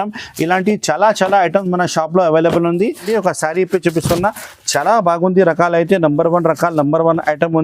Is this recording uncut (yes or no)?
no